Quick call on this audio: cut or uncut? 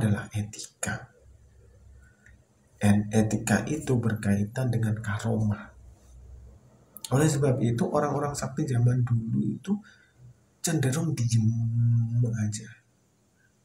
uncut